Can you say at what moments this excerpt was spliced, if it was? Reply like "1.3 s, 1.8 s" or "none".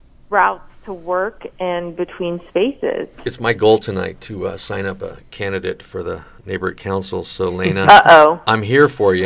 3.1 s